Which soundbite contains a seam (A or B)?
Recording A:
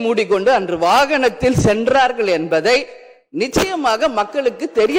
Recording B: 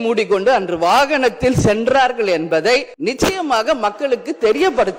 B